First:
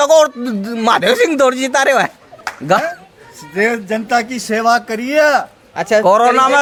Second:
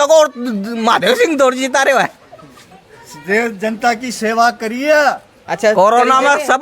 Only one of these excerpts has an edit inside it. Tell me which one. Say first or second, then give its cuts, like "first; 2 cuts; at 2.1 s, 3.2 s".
second; 1 cut; at 2.6 s